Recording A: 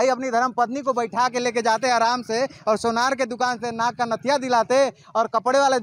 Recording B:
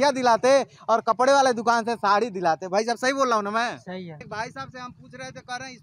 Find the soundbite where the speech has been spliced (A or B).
B